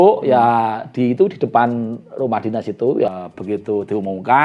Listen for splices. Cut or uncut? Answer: cut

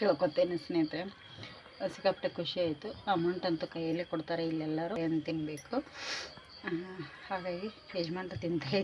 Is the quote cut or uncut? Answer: cut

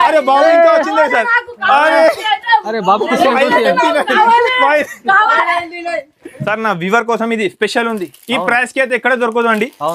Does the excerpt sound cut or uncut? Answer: uncut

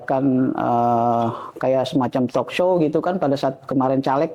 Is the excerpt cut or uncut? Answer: uncut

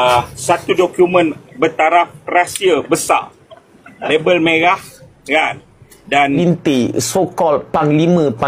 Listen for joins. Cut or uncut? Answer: cut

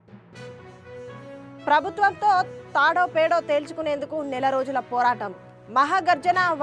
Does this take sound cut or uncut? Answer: uncut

